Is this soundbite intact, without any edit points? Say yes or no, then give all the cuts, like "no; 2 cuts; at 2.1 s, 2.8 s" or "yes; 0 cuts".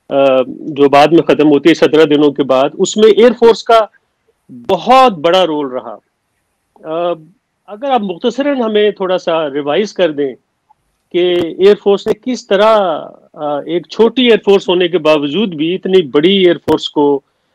yes; 0 cuts